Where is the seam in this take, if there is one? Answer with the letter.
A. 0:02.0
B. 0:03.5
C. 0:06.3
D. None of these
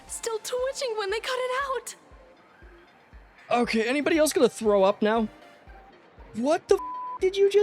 B